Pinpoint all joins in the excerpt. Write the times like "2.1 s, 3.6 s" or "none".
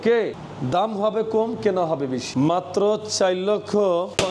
2.2 s